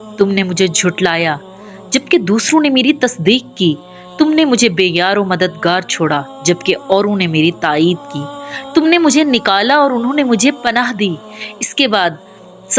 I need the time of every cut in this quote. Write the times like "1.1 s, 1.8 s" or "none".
none